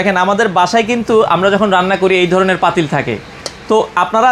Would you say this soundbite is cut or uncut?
uncut